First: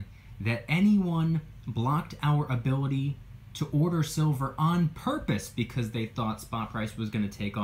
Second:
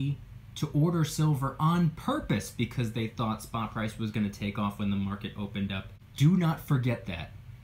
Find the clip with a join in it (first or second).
second